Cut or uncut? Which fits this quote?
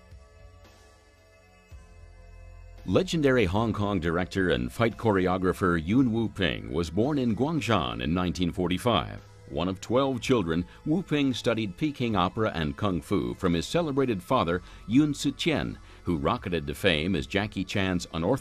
cut